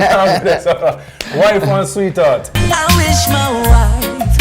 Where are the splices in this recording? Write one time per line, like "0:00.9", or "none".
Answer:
0:02.5